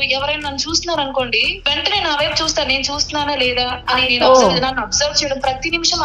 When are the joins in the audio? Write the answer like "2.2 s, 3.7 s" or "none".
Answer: 1.5 s